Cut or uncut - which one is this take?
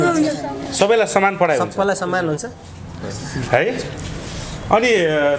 uncut